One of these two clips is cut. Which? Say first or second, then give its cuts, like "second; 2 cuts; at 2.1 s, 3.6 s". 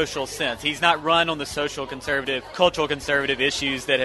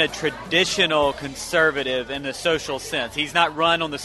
first; 1 cut; at 2.5 s